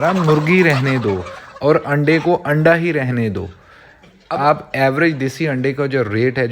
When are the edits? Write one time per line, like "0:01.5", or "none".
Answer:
0:04.1